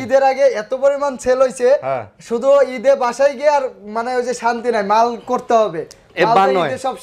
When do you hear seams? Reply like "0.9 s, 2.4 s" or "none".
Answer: none